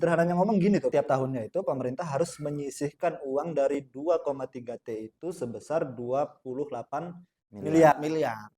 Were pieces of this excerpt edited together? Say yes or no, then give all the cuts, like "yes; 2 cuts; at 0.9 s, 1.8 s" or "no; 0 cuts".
yes; 1 cut; at 0.9 s